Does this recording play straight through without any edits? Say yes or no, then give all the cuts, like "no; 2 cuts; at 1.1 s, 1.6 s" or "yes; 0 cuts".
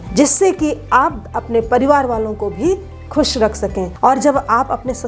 no; 1 cut; at 3.9 s